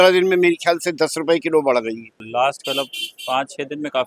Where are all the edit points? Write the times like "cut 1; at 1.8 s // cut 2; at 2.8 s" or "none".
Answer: cut 1; at 2.2 s